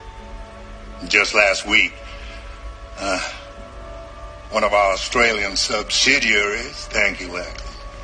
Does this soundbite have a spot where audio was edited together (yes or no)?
no